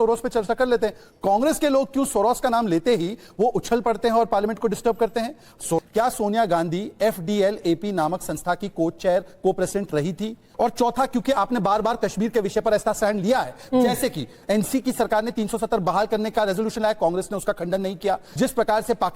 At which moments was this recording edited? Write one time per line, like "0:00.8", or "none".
0:04.3
0:05.8
0:10.5
0:18.3